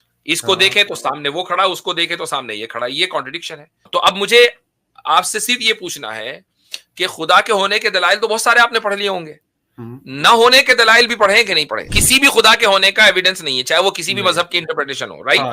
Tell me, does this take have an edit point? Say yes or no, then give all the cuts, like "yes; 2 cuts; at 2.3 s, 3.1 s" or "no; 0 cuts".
yes; 2 cuts; at 3.8 s, 12.0 s